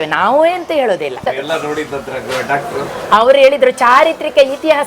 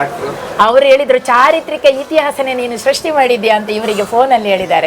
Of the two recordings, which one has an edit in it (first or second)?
first